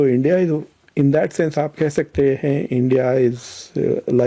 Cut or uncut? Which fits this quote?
uncut